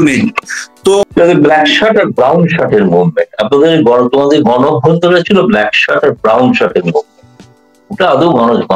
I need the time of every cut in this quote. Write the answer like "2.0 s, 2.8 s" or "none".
1.0 s